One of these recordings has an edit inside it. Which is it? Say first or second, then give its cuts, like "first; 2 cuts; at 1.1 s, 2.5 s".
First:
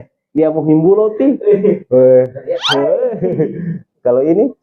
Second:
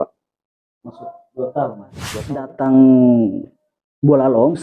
second; 1 cut; at 2.0 s